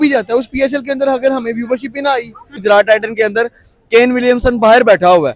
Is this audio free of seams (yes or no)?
no